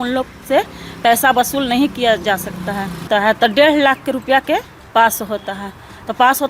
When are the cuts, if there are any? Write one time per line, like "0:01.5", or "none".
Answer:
0:03.1